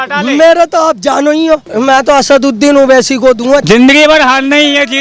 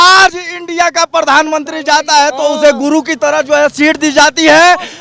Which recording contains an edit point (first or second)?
first